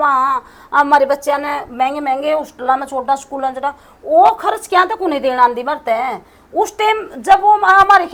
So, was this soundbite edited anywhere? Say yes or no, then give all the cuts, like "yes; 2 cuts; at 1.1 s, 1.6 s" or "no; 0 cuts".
no; 0 cuts